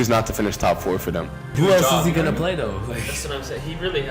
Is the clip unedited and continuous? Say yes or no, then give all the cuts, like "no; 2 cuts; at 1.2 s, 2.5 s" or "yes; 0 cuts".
no; 1 cut; at 1.5 s